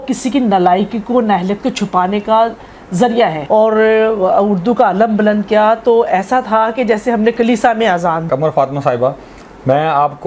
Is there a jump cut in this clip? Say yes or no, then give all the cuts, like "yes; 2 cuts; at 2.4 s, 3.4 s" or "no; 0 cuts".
yes; 2 cuts; at 3.4 s, 8.3 s